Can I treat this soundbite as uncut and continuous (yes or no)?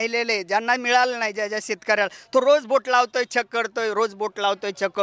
yes